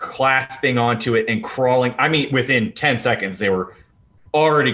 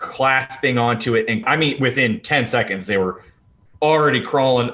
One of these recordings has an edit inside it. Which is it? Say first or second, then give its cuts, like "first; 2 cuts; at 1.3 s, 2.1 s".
second; 1 cut; at 1.4 s